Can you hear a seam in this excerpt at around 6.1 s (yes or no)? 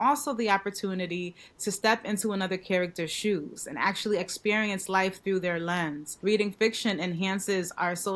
yes